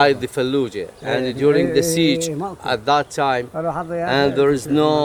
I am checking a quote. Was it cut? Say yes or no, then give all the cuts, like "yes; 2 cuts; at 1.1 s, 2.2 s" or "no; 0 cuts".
no; 0 cuts